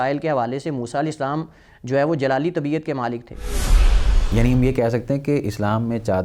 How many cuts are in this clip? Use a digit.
1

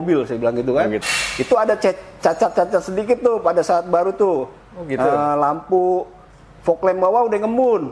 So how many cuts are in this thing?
1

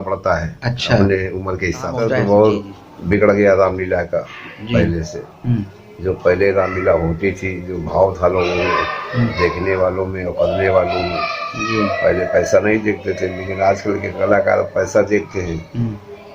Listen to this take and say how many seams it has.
1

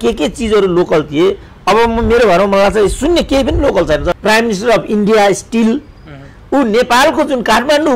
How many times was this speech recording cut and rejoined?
1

